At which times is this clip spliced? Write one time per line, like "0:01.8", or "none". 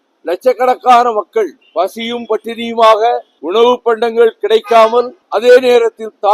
0:01.6
0:03.3
0:05.2